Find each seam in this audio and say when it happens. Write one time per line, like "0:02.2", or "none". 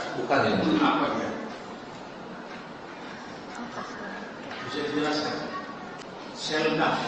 0:06.0